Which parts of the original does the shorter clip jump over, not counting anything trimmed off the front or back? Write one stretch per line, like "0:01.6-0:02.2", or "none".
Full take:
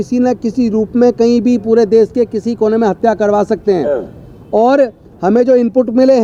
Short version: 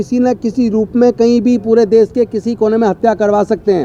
none